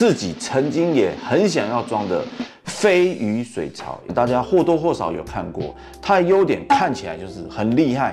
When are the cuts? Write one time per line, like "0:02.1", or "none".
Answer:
0:04.0